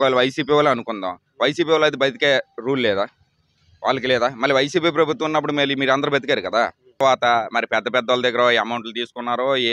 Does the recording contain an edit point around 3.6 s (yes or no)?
no